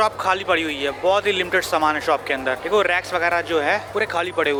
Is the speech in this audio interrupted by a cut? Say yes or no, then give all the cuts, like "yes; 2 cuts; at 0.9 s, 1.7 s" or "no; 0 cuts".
no; 0 cuts